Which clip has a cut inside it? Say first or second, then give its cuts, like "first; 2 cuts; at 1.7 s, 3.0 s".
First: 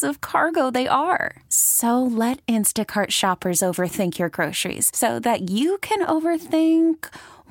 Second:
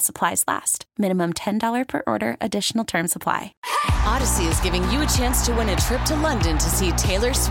second; 1 cut; at 3.5 s